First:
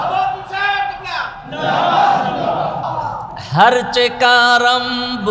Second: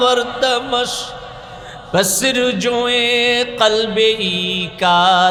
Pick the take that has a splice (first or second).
first